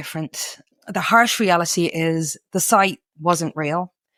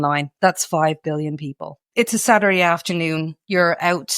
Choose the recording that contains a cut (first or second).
second